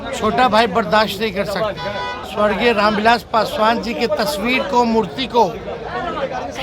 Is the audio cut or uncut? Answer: cut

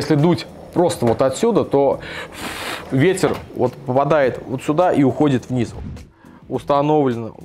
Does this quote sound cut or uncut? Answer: cut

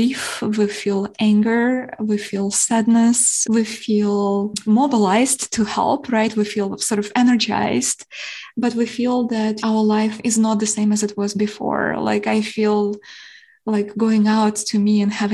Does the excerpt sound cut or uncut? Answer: uncut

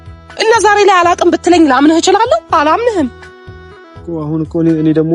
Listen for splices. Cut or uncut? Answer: uncut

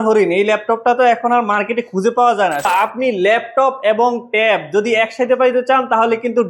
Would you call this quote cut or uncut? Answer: cut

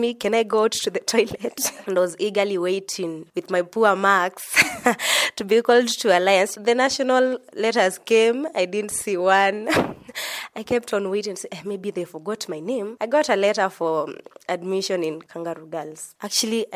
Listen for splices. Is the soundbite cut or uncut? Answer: cut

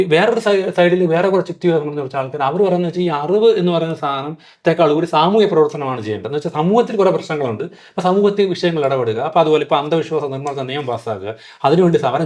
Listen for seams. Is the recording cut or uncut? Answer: uncut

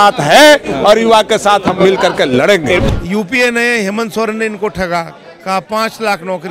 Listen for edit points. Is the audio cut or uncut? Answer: cut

